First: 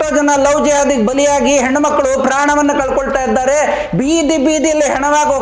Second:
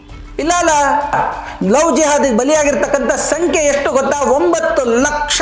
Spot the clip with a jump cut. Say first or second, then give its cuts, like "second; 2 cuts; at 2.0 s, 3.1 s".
second; 1 cut; at 1.1 s